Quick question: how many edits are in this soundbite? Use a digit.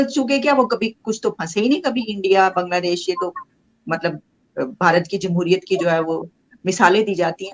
0